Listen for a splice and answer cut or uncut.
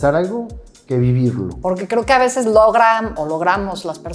cut